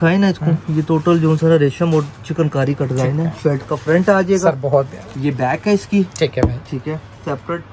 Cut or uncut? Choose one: uncut